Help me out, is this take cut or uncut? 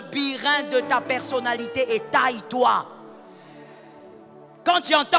uncut